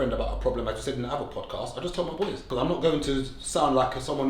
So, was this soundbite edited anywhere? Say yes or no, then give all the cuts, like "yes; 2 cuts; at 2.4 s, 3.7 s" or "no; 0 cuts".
yes; 1 cut; at 2.4 s